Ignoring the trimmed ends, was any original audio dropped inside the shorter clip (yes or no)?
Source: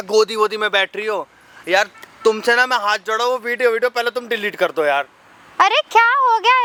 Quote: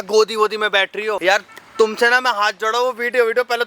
yes